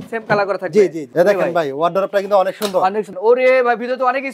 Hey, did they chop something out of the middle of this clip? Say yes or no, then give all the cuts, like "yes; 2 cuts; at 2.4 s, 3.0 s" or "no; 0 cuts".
yes; 2 cuts; at 1.1 s, 3.1 s